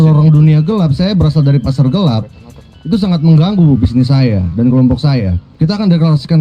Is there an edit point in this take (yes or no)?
yes